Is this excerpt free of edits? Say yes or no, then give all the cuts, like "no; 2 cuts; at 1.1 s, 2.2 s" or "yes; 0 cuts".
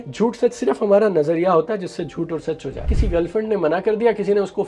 no; 1 cut; at 2.9 s